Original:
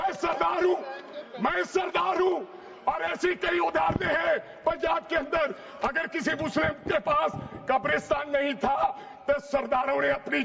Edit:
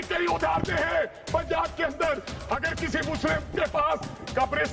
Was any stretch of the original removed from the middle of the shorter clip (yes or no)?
no